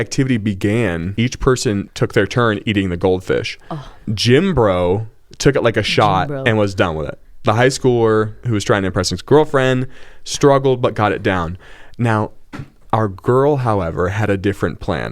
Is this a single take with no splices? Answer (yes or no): no